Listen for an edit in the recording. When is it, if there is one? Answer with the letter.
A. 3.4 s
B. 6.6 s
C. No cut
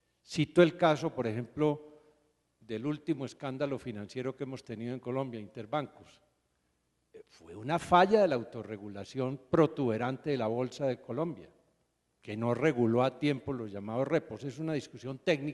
A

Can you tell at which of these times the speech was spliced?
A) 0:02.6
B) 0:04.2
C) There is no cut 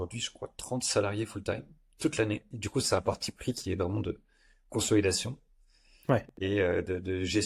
A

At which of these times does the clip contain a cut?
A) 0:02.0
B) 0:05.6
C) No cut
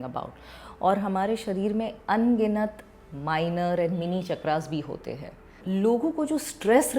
B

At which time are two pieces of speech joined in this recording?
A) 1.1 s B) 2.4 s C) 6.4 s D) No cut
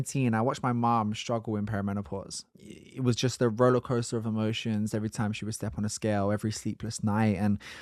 B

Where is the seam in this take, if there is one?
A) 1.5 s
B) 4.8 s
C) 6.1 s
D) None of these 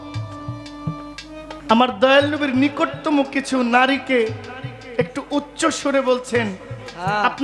D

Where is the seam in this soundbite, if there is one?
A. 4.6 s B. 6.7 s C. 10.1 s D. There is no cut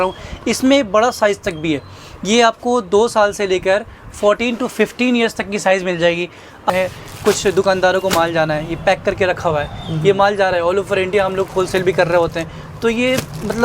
B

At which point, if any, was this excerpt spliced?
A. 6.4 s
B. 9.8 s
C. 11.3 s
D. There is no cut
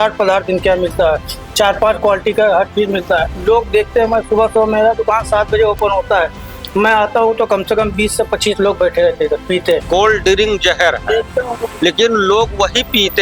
B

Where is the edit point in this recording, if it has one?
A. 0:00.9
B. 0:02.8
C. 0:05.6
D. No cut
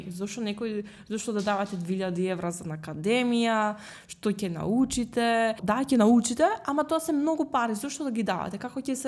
C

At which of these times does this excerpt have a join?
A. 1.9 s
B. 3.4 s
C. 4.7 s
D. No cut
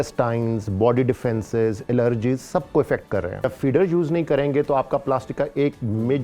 B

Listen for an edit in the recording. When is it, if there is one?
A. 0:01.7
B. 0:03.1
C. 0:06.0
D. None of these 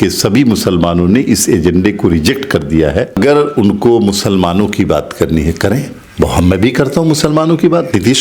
B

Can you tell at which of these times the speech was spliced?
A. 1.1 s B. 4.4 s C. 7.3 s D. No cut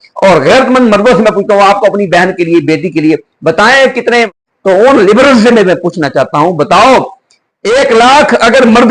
B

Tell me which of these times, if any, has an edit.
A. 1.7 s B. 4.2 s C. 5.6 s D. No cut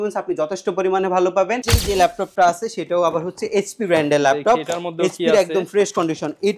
A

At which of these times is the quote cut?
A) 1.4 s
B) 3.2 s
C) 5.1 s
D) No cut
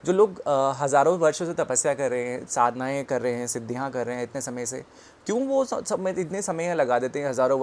D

